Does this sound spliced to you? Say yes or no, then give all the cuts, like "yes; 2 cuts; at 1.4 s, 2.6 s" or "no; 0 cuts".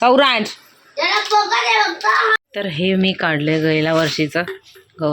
yes; 1 cut; at 2.4 s